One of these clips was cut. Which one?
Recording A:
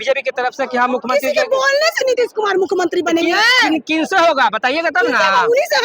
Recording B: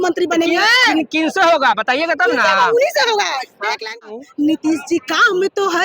B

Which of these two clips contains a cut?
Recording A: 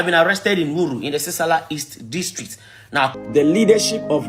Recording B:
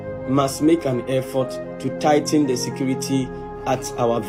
A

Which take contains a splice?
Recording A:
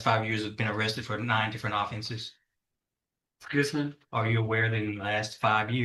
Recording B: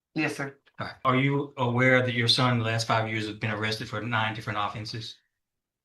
B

